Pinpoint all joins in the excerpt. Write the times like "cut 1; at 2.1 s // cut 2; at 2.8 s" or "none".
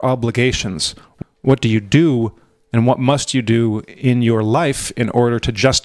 cut 1; at 1.1 s